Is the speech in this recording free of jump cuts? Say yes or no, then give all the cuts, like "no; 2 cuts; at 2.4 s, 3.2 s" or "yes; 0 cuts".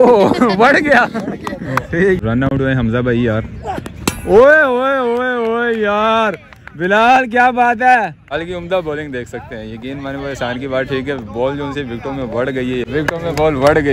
no; 3 cuts; at 2.2 s, 8.3 s, 12.8 s